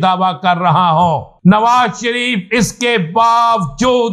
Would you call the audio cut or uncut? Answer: cut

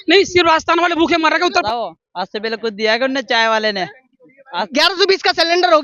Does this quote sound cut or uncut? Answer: cut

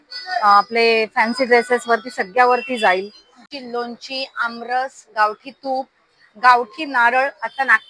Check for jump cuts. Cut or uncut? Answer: cut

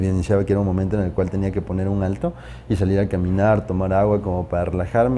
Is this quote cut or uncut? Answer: uncut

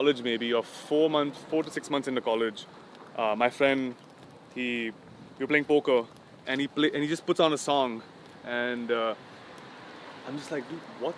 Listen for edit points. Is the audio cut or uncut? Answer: uncut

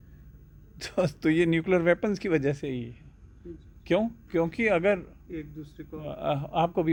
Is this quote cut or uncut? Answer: uncut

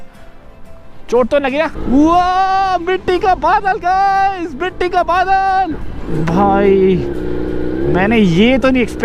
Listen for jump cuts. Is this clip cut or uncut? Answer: cut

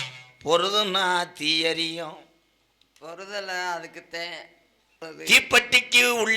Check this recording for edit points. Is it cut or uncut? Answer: cut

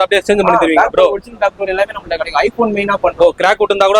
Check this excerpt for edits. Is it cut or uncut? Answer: uncut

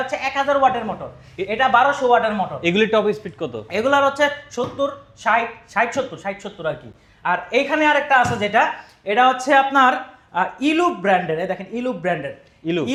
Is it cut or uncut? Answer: uncut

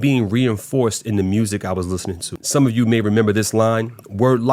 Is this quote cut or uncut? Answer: cut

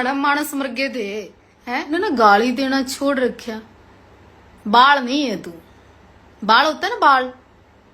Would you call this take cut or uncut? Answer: cut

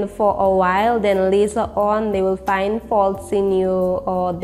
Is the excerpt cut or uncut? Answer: uncut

